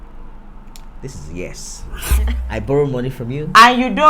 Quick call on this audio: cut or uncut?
cut